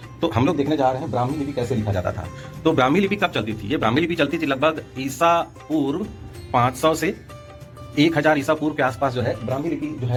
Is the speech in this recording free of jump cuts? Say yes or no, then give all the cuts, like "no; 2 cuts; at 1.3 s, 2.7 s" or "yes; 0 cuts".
yes; 0 cuts